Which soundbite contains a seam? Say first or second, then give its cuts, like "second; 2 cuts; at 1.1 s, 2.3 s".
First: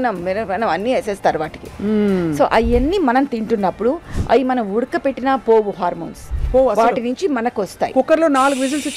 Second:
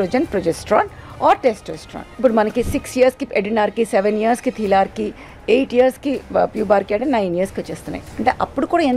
second; 1 cut; at 2.1 s